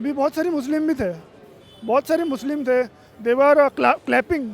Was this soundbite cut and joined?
no; 0 cuts

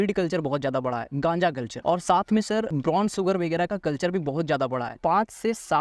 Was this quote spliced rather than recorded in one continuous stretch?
yes; 3 cuts; at 1.7 s, 2.7 s, 4.9 s

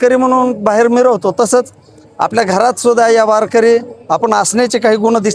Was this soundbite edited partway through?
no; 0 cuts

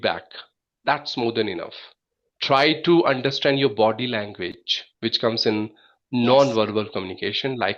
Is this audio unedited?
yes; 0 cuts

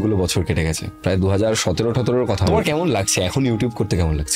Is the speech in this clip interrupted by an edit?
yes; 1 cut; at 2.5 s

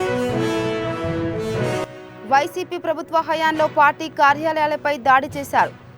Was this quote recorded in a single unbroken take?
no; 1 cut; at 1.9 s

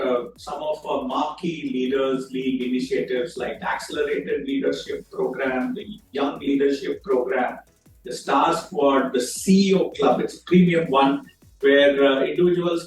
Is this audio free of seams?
yes; 0 cuts

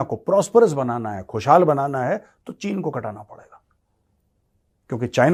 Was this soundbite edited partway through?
no; 0 cuts

